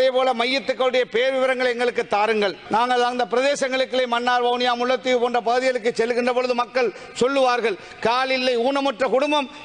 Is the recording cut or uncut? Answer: cut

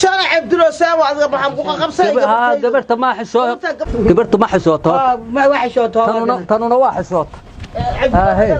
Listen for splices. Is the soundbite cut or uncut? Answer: cut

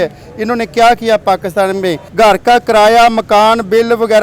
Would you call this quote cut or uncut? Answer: cut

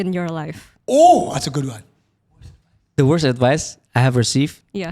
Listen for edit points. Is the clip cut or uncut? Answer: cut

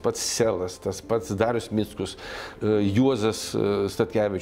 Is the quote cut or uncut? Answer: uncut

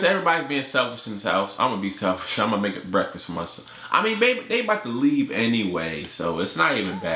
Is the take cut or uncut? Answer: uncut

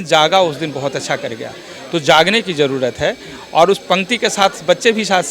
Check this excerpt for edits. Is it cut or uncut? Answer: uncut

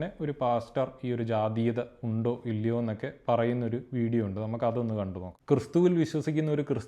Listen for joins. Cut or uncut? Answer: cut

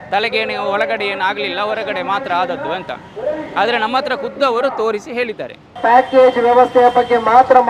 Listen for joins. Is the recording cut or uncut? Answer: cut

